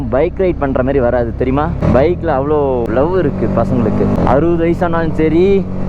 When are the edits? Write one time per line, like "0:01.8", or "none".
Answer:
0:01.8
0:02.9
0:04.2